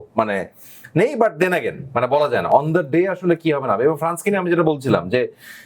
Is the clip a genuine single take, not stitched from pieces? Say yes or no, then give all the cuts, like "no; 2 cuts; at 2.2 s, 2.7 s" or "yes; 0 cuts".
yes; 0 cuts